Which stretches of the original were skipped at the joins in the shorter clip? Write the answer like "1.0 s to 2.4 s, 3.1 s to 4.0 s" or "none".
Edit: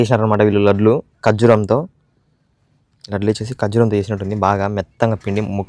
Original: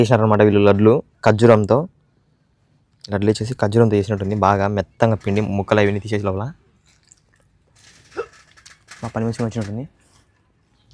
none